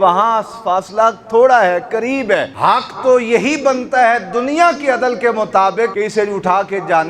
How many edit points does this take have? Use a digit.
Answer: 2